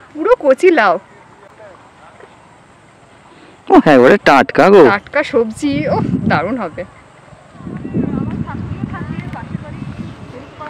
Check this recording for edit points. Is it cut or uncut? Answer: uncut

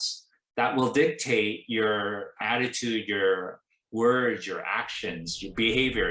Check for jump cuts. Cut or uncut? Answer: cut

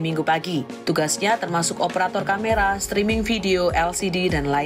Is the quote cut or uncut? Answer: uncut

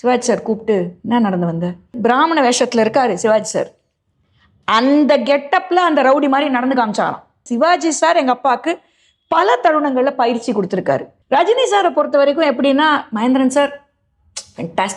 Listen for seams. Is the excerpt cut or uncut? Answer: cut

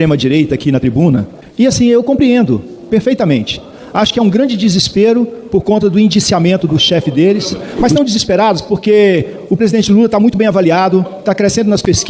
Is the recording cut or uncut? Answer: cut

